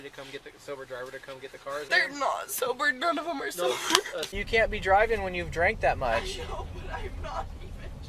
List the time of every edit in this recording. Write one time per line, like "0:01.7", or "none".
0:01.9
0:04.3